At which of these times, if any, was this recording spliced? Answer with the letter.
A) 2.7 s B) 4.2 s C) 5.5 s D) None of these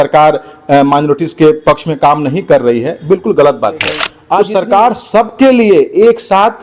B